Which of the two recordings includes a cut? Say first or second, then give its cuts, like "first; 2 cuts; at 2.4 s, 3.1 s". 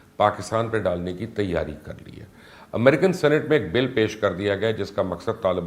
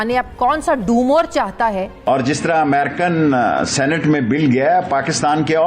second; 1 cut; at 2.0 s